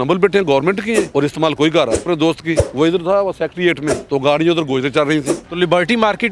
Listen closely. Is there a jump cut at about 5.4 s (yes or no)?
yes